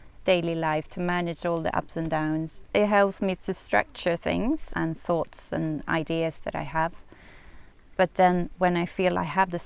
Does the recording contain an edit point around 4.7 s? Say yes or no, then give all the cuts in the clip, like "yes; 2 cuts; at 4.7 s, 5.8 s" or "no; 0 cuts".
yes; 2 cuts; at 2.7 s, 4.7 s